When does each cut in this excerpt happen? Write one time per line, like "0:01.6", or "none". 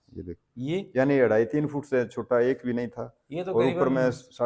none